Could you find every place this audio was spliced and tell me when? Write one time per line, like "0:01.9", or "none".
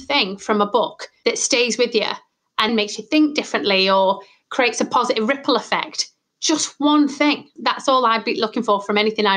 0:01.0
0:02.7
0:07.5